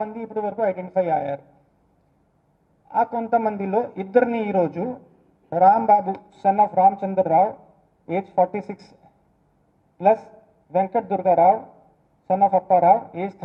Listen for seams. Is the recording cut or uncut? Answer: uncut